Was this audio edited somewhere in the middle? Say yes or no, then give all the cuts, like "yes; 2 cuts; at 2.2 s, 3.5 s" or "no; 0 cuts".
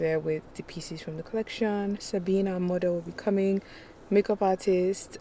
no; 0 cuts